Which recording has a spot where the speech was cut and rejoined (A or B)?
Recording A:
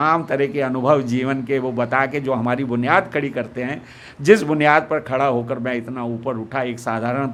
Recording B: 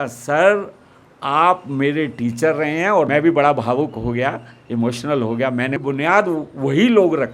B